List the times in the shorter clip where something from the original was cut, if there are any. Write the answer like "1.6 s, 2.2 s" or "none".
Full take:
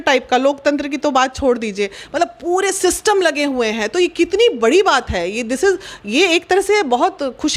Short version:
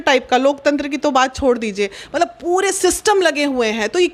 none